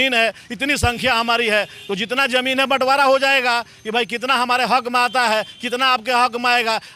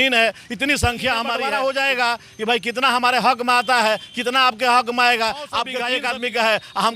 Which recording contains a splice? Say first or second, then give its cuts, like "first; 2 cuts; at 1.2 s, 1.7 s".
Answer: second; 2 cuts; at 1.3 s, 5.8 s